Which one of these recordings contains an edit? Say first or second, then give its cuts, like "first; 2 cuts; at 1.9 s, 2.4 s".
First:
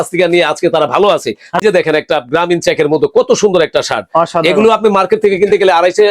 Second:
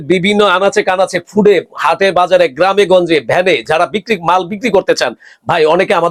first; 1 cut; at 1.6 s